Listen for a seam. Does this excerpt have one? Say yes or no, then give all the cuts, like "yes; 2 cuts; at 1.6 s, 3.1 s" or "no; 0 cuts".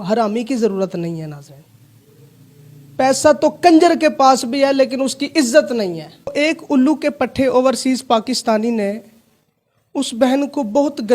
yes; 1 cut; at 6.3 s